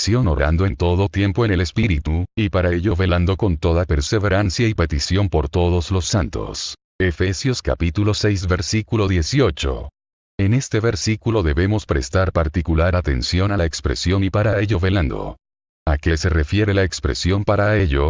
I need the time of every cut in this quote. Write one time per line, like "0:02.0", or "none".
0:06.0

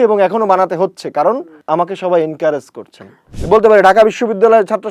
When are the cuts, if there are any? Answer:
0:01.6
0:03.3

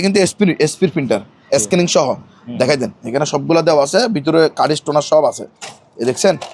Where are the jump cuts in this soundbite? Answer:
none

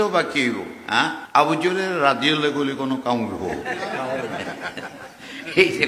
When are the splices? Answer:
0:01.2

